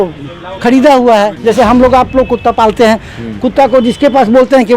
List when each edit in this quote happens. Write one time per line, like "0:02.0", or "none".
0:01.3